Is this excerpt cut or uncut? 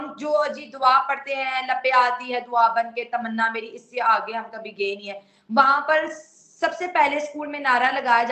uncut